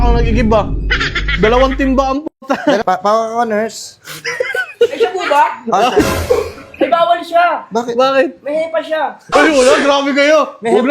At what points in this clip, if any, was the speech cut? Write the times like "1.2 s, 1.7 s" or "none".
2.8 s